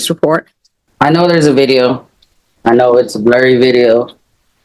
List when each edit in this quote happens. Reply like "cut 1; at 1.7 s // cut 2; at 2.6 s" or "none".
cut 1; at 0.9 s